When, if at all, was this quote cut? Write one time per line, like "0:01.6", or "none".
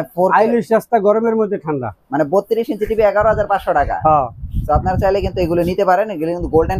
none